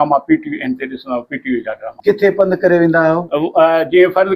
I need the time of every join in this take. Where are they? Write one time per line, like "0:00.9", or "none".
0:01.9